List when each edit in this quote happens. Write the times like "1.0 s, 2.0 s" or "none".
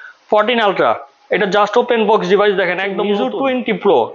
3.1 s